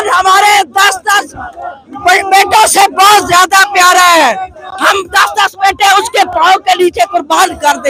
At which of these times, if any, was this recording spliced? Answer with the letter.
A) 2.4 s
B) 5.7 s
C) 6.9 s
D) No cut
D